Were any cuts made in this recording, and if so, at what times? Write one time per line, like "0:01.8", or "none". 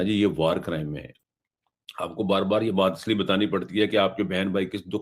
0:01.1